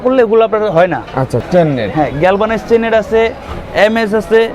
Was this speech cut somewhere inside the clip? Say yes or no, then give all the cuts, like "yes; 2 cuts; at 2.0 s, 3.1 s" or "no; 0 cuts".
yes; 1 cut; at 1.4 s